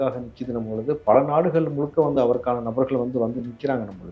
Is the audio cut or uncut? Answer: uncut